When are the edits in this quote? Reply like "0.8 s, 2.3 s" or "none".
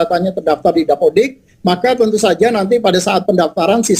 1.4 s